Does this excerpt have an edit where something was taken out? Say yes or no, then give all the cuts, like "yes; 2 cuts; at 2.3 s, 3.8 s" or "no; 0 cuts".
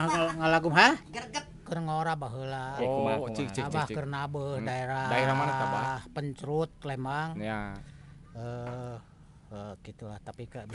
yes; 1 cut; at 1.7 s